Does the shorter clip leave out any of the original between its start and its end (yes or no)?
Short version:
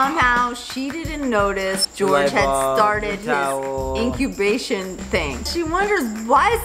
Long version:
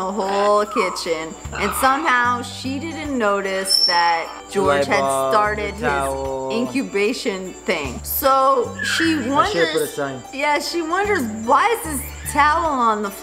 yes